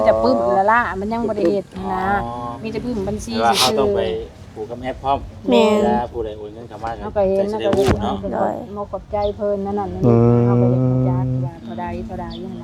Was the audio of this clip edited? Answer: no; 0 cuts

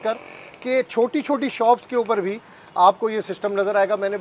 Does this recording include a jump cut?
no; 0 cuts

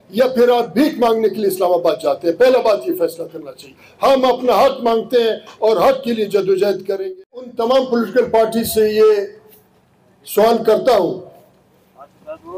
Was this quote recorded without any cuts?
no; 1 cut; at 7.1 s

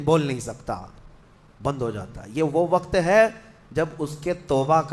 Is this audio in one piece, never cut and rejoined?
yes; 0 cuts

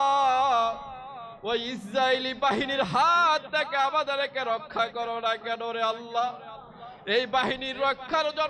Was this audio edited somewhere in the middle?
no; 0 cuts

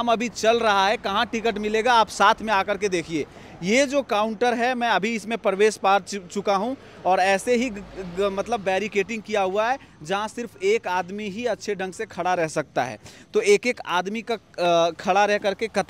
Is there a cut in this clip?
no; 0 cuts

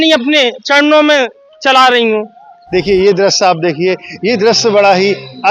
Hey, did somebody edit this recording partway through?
yes; 1 cut; at 2.5 s

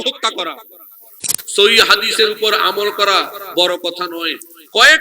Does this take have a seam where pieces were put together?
yes; 1 cut; at 1.4 s

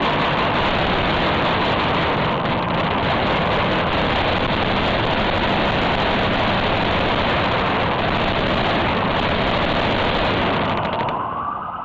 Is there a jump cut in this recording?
no; 0 cuts

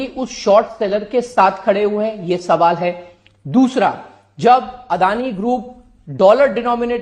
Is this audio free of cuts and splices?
yes; 0 cuts

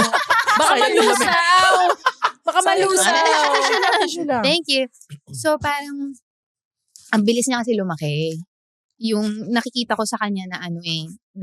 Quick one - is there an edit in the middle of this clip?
no; 0 cuts

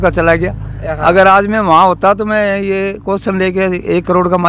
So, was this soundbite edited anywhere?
no; 0 cuts

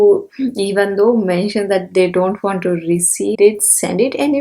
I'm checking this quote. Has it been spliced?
yes; 1 cut; at 3.3 s

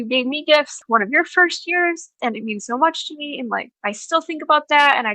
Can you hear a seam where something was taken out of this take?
yes; 3 cuts; at 0.8 s, 2.1 s, 3.7 s

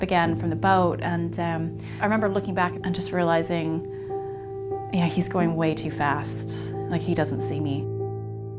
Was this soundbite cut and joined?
no; 0 cuts

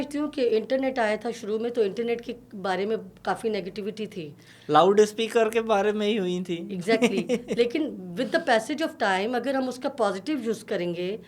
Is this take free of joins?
yes; 0 cuts

